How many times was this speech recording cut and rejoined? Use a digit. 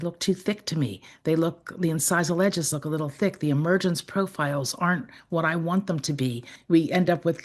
1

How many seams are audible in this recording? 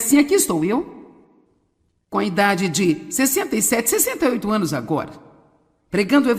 1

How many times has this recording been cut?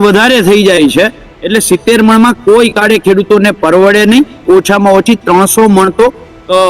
1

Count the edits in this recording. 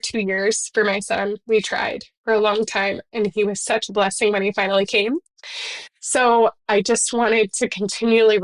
0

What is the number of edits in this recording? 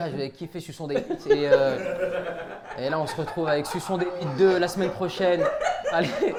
0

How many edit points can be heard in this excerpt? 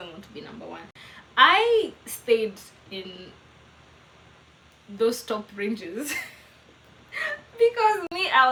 0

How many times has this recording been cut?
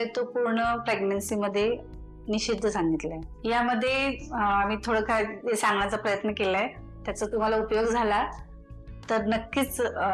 0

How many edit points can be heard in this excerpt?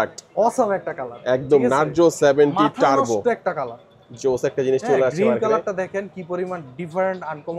0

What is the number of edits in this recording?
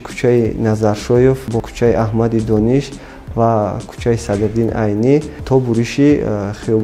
2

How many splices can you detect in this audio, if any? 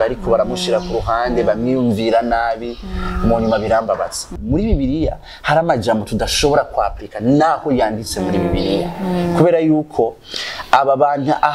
1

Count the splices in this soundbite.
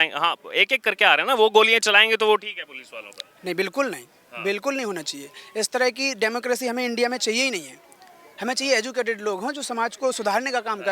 0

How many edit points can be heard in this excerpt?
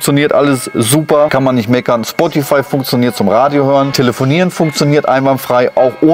2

